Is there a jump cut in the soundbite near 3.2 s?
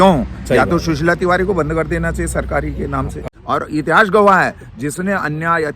yes; 1 cut; at 3.2 s

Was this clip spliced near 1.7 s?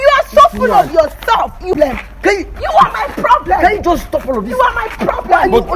yes; 1 cut; at 1.7 s

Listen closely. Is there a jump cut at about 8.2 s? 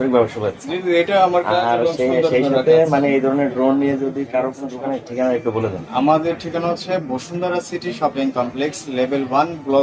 no; 1 cut; at 4.7 s

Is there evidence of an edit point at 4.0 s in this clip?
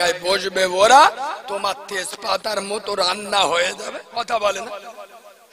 yes; 1 cut; at 4.0 s

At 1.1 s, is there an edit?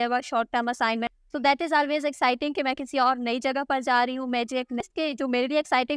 yes; 2 cuts; at 1.1 s, 4.8 s

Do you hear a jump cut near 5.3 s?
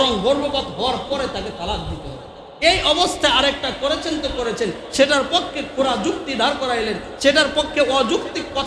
no; 0 cuts

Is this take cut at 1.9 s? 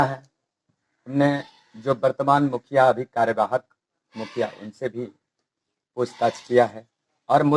no; 0 cuts

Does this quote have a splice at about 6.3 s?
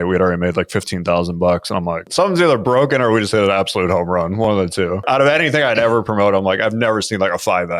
no; 2 cuts; at 2.0 s, 5.1 s

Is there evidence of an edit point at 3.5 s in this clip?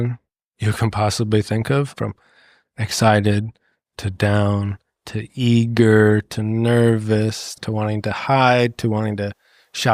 no; 2 cuts; at 1.9 s, 7.5 s

